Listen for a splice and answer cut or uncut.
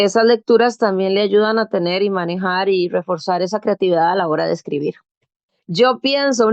cut